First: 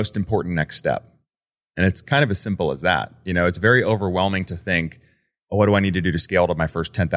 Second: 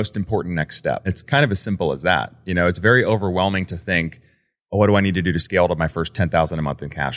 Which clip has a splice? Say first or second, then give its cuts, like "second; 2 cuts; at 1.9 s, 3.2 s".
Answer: second; 1 cut; at 1.2 s